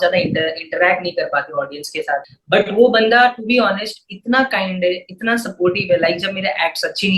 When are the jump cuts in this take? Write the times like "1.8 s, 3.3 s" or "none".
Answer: 2.3 s